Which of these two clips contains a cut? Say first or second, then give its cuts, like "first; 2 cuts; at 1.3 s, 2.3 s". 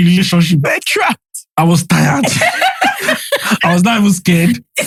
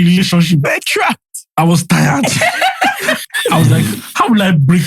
second; 1 cut; at 3.3 s